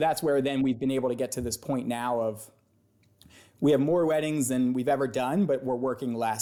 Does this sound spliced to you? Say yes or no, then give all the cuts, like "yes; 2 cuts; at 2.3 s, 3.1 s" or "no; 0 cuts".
no; 0 cuts